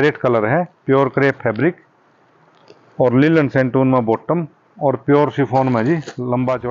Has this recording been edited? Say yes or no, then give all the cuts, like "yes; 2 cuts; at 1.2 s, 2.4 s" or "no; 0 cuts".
no; 0 cuts